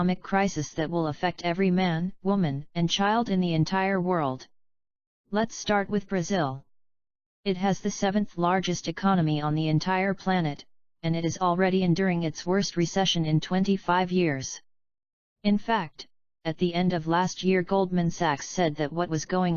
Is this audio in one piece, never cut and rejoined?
yes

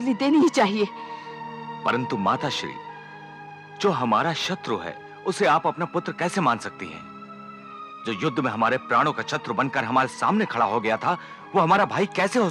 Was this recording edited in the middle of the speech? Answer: no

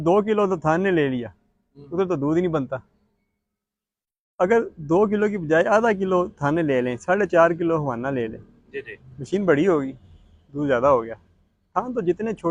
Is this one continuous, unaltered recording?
yes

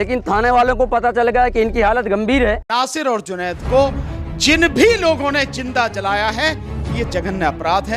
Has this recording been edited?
yes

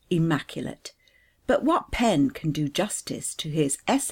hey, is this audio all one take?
no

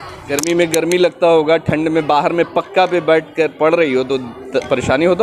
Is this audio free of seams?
yes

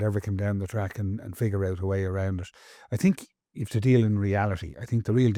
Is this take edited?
no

